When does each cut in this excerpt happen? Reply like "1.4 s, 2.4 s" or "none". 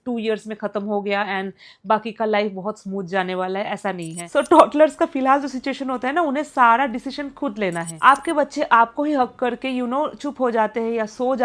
4.2 s, 7.9 s